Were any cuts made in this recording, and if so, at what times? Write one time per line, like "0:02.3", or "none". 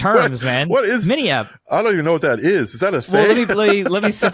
0:01.7